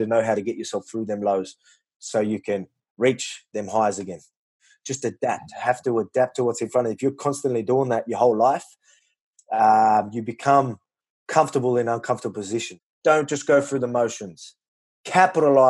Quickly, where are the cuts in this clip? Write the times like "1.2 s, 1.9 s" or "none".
4.7 s, 12.8 s